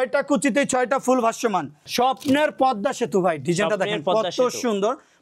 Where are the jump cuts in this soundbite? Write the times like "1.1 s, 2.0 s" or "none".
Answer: 1.8 s